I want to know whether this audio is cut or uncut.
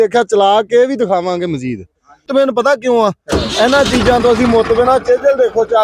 cut